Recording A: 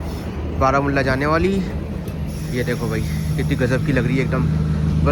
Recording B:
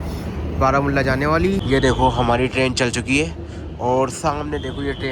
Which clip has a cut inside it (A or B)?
B